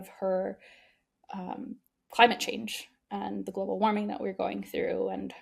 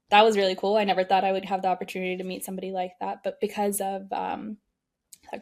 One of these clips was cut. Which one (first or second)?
first